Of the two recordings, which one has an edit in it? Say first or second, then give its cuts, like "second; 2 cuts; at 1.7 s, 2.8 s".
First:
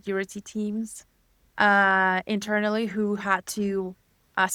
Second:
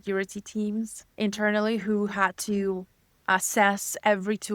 second; 1 cut; at 1.1 s